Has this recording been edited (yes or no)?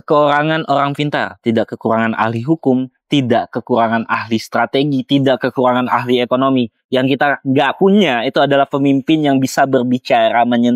no